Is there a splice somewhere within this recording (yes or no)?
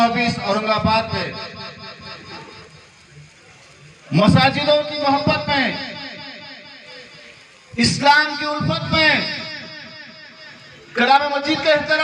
no